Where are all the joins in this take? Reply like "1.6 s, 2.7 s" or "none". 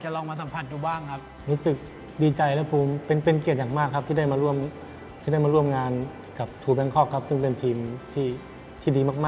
1.3 s